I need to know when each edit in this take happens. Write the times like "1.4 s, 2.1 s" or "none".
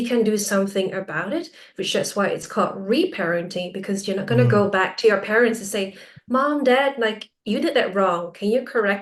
none